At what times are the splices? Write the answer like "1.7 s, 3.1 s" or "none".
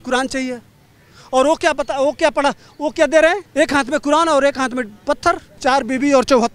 3.4 s, 5.6 s